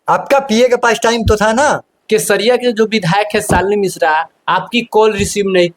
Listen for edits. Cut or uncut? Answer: cut